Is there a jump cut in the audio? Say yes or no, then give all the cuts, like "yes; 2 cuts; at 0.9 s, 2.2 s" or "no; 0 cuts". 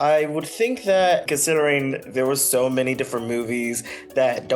yes; 1 cut; at 1.2 s